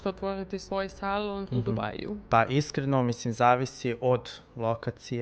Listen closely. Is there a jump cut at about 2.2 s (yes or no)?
yes